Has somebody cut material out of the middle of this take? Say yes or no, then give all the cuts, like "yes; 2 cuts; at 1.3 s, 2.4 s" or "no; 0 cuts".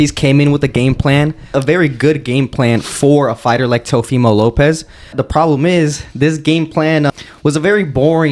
yes; 3 cuts; at 1.5 s, 5.2 s, 7.1 s